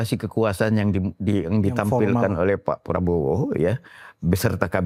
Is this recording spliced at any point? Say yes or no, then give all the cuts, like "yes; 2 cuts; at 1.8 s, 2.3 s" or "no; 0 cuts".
no; 0 cuts